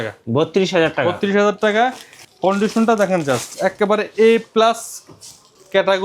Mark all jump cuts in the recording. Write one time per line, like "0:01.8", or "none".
none